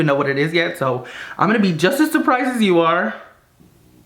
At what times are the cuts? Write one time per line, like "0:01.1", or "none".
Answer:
none